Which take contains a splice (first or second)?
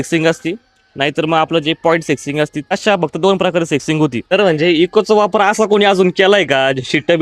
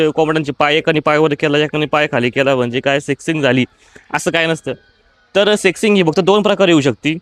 first